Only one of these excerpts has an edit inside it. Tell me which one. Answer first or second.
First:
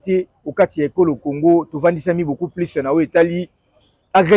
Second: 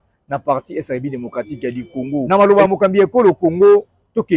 second